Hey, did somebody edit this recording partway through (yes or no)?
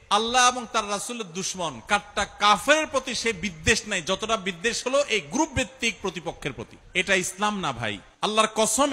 yes